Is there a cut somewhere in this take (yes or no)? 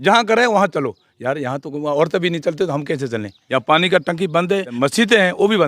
yes